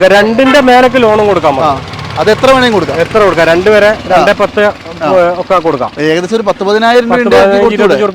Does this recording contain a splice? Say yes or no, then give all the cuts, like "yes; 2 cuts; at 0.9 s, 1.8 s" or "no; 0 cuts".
no; 0 cuts